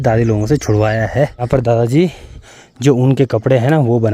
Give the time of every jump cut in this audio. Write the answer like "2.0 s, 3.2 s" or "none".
1.5 s